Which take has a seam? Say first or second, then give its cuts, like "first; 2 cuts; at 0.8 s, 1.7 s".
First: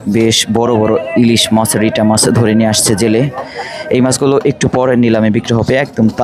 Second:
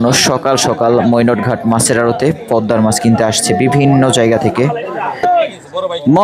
second; 1 cut; at 5.2 s